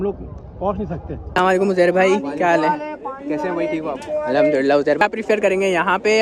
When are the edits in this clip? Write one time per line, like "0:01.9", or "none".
0:01.2
0:05.0